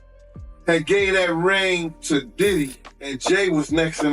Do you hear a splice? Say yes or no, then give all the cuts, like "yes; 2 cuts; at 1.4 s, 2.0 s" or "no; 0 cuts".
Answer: yes; 1 cut; at 3.2 s